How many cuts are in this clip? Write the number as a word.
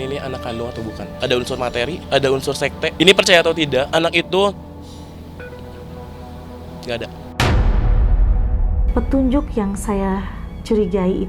five